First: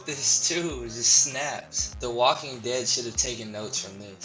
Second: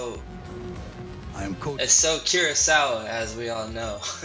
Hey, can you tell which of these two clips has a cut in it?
first; 1 cut; at 1.8 s

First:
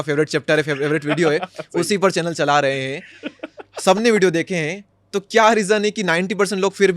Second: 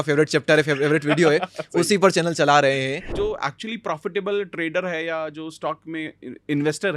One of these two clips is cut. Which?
second; 1 cut; at 3.1 s

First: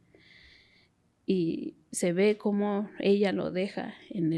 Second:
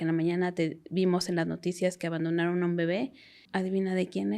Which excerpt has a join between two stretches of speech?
second; 1 cut; at 3.3 s

